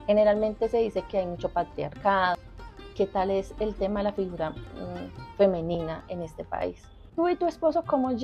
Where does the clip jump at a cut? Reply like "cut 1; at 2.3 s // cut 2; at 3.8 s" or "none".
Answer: cut 1; at 2.4 s // cut 2; at 7.0 s

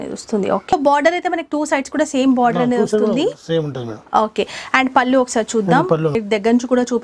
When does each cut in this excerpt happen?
cut 1; at 0.7 s // cut 2; at 6.2 s

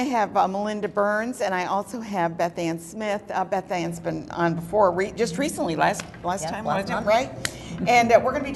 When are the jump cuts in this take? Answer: none

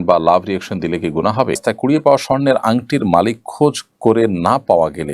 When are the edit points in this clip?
cut 1; at 1.6 s

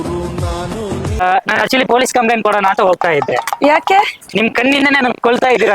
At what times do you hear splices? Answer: cut 1; at 1.2 s

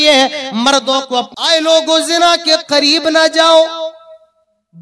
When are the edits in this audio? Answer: cut 1; at 1.3 s

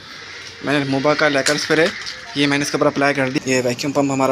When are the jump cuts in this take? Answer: cut 1; at 3.4 s

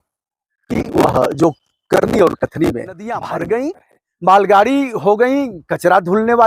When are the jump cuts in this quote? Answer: cut 1; at 3.3 s

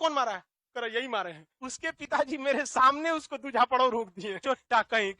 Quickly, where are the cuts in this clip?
cut 1; at 1.5 s // cut 2; at 4.3 s

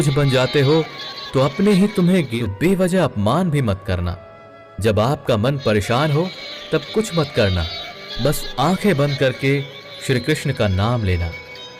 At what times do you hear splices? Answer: cut 1; at 2.3 s

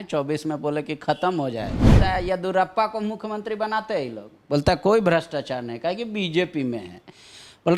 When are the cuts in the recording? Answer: cut 1; at 1.9 s

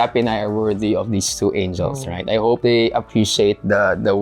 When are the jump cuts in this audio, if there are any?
cut 1; at 2.6 s

